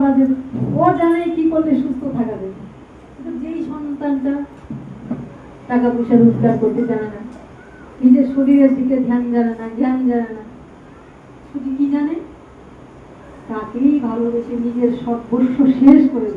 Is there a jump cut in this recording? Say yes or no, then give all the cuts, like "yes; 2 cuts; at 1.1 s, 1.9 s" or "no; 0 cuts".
no; 0 cuts